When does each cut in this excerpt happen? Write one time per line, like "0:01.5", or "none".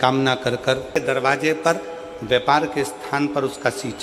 0:01.0